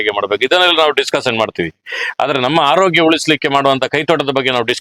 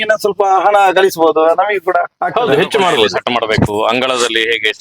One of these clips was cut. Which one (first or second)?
second